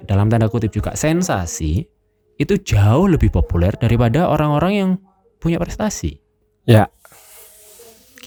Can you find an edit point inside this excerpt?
no; 0 cuts

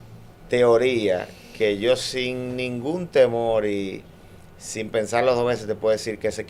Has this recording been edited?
no; 0 cuts

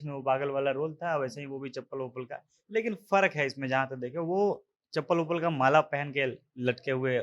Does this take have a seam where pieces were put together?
no; 0 cuts

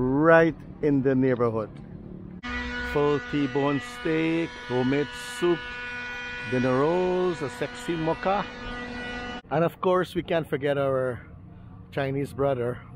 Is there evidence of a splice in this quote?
yes; 2 cuts; at 2.4 s, 9.3 s

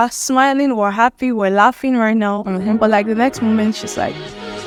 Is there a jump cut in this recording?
no; 0 cuts

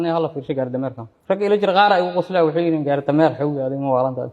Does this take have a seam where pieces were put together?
yes; 1 cut; at 1.1 s

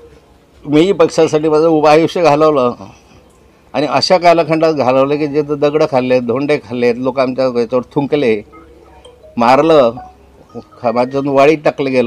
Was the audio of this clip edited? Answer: no; 0 cuts

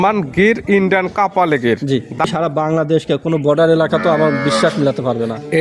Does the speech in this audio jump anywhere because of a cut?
yes; 1 cut; at 2.2 s

